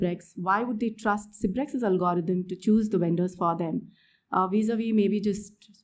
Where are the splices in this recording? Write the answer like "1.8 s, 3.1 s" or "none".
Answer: none